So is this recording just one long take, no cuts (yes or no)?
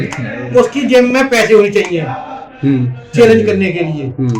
yes